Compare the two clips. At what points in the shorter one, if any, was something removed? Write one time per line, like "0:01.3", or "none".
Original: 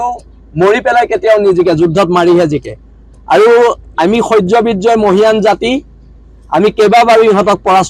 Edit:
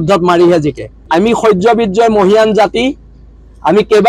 0:01.0